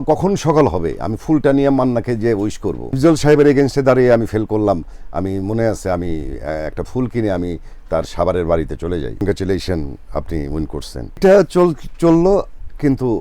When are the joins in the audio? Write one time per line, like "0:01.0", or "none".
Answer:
0:03.0
0:09.2
0:11.2